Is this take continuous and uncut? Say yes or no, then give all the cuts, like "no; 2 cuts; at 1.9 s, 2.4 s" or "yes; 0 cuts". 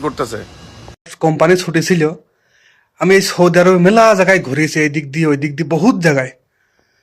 no; 1 cut; at 1.1 s